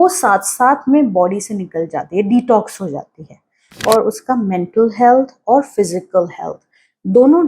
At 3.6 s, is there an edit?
yes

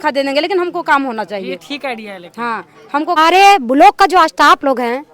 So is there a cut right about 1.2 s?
no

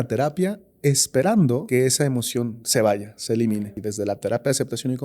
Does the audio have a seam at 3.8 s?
yes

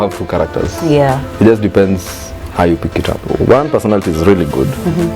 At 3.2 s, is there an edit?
yes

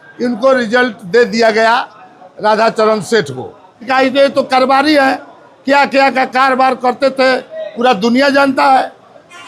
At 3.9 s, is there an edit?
yes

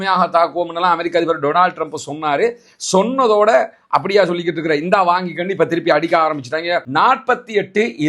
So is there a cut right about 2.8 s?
no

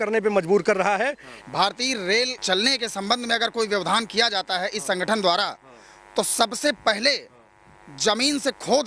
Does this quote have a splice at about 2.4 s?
yes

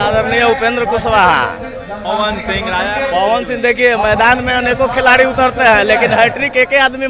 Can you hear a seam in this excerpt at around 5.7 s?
no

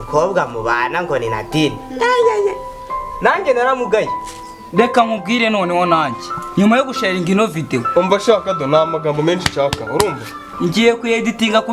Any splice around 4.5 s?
yes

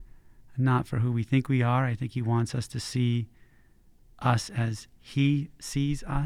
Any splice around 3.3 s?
no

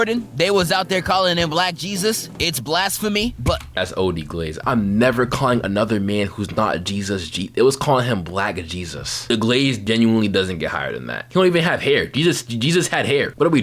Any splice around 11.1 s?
yes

